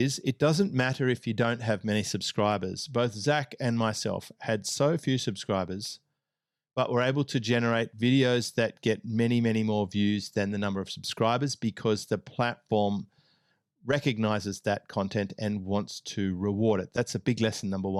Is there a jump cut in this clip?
no; 0 cuts

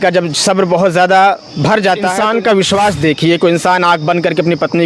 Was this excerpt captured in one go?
no; 1 cut; at 2.1 s

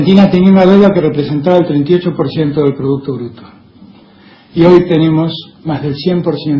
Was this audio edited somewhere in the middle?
no; 0 cuts

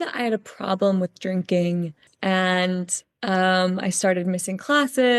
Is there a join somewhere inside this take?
yes; 1 cut; at 2.0 s

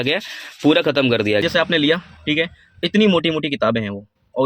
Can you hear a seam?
yes; 1 cut; at 1.4 s

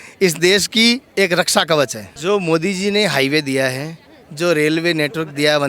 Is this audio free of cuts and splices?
no; 2 cuts; at 1.1 s, 2.1 s

